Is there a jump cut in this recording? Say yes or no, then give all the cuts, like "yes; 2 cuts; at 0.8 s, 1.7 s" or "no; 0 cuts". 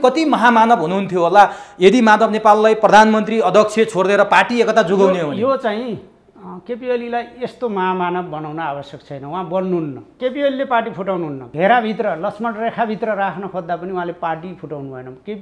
yes; 2 cuts; at 10.2 s, 11.4 s